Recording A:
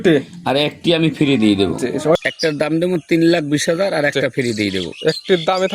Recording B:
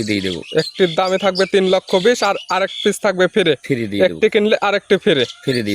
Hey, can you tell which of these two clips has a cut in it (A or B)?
A